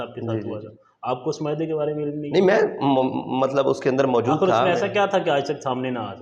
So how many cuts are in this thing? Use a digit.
0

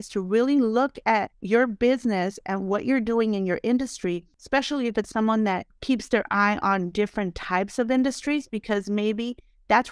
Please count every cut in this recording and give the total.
3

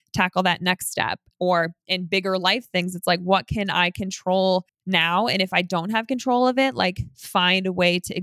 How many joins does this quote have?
1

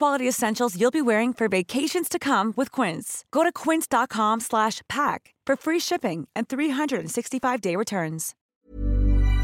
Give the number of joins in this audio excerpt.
1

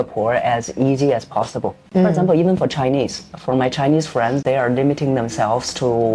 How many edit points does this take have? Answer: 1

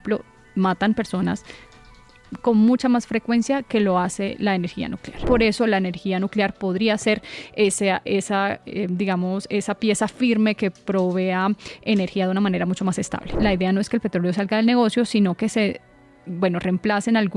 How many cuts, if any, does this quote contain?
2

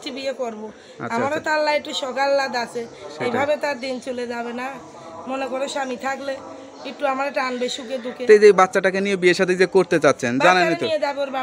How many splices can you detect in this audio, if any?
0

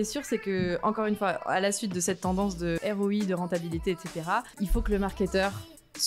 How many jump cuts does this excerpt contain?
2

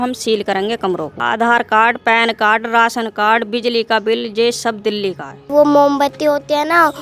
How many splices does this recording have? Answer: 2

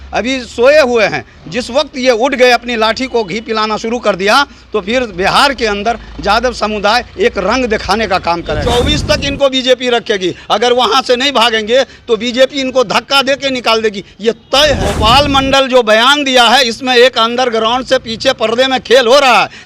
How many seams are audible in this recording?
2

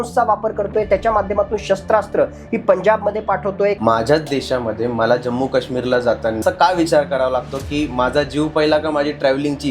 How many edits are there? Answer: 2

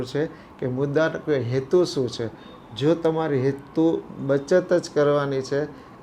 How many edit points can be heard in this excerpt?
0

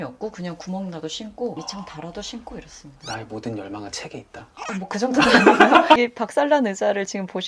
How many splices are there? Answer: 1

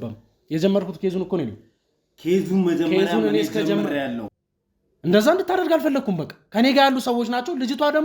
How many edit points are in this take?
1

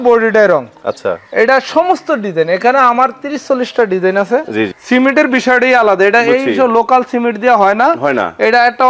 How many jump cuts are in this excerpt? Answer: 1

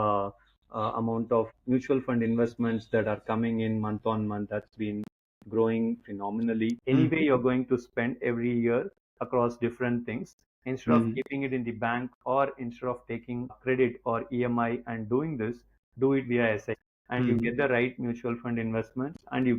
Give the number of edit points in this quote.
4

